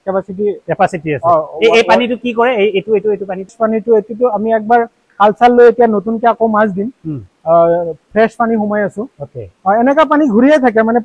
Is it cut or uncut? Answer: uncut